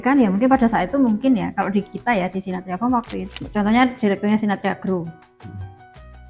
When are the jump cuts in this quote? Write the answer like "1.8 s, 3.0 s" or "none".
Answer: 3.3 s